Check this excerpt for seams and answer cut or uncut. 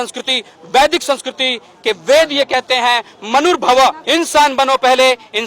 cut